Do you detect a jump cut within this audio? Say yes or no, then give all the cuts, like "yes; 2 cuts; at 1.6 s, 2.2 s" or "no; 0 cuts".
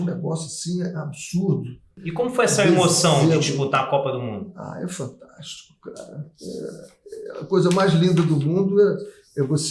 yes; 1 cut; at 2.0 s